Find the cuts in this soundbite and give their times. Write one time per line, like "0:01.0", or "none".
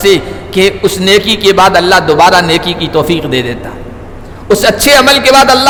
none